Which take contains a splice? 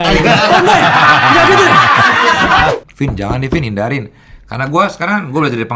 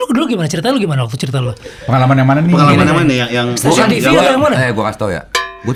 first; 1 cut; at 2.7 s

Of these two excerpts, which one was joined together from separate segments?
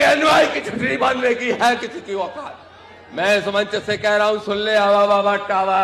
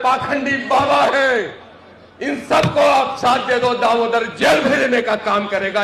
first; 1 cut; at 3.7 s

